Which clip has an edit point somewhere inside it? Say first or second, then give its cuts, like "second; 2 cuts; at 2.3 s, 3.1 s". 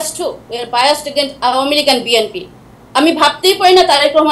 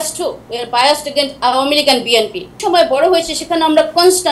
second; 1 cut; at 2.6 s